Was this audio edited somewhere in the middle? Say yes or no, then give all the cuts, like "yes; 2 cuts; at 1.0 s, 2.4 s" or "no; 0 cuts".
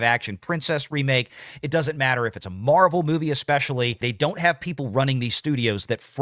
yes; 1 cut; at 4.0 s